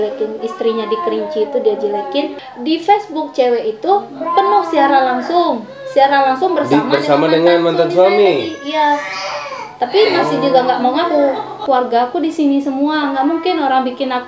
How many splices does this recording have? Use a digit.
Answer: 2